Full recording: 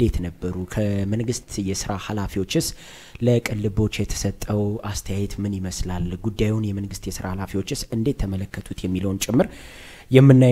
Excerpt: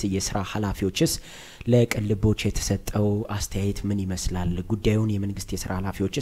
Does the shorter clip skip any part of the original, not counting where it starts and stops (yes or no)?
no